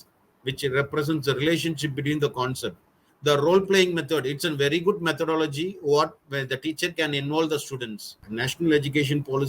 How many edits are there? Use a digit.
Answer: 2